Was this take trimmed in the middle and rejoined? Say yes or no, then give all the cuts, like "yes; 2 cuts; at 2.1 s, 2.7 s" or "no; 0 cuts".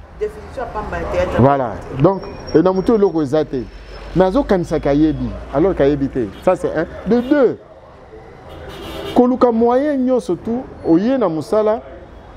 no; 0 cuts